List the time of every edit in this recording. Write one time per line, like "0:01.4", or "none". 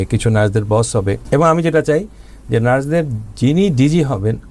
0:01.2